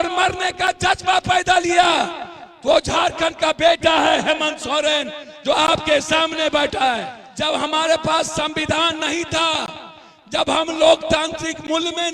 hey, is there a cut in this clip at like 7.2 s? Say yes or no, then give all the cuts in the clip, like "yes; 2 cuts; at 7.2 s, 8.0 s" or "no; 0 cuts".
yes; 1 cut; at 7.2 s